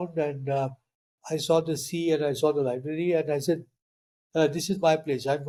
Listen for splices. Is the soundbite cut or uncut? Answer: uncut